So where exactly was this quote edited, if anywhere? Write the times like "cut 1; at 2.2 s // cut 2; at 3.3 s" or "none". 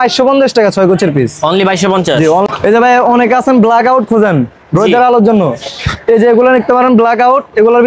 cut 1; at 2.5 s